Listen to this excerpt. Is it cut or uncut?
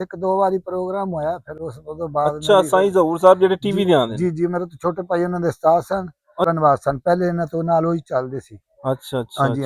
cut